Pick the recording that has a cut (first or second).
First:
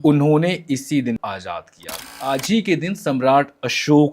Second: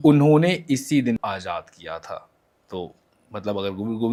first